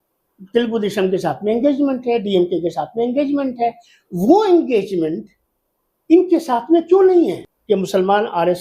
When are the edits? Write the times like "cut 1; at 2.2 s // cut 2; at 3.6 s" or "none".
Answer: cut 1; at 7.5 s